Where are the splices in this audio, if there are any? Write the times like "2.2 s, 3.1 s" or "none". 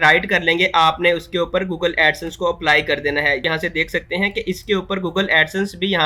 3.4 s